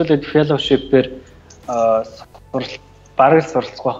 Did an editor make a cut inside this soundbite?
no; 0 cuts

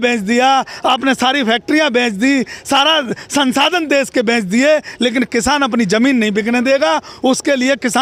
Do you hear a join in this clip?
no; 0 cuts

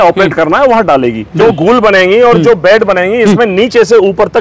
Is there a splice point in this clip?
yes; 1 cut; at 1.4 s

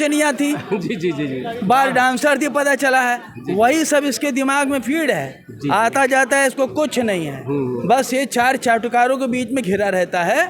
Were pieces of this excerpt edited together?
no; 0 cuts

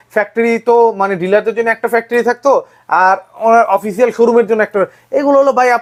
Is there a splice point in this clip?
no; 0 cuts

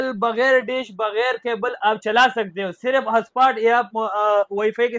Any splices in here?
no; 0 cuts

